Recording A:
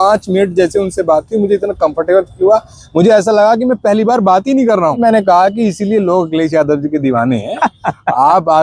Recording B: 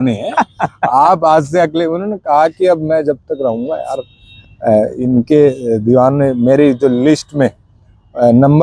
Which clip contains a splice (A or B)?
A